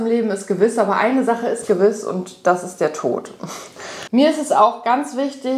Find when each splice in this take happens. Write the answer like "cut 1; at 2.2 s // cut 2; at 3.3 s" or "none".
cut 1; at 4.0 s